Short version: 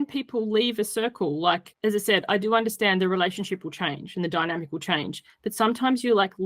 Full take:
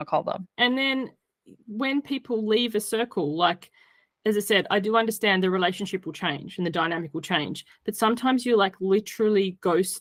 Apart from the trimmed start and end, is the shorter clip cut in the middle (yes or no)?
yes